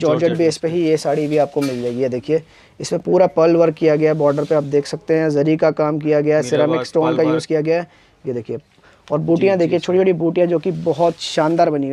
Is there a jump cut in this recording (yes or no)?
no